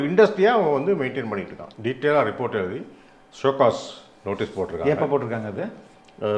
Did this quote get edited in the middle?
yes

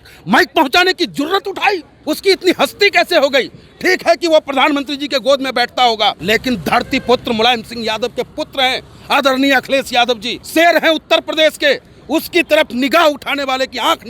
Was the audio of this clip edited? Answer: yes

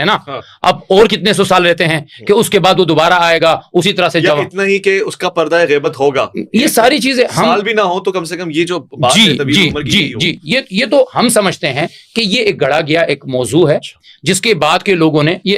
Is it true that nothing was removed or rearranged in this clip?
yes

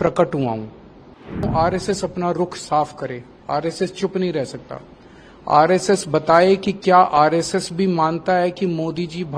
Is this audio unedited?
no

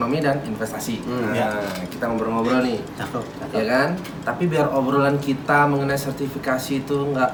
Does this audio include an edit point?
no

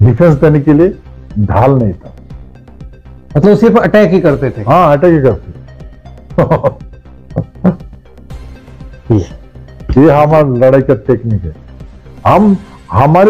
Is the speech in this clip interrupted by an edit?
no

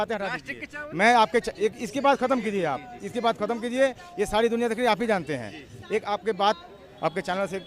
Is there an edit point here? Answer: no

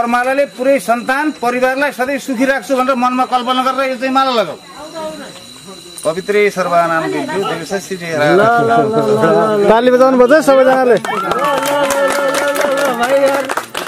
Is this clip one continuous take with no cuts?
yes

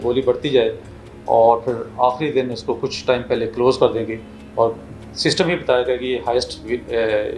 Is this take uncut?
yes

